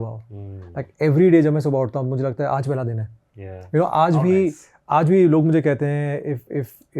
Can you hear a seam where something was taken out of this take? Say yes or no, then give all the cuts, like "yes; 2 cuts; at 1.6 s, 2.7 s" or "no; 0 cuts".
no; 0 cuts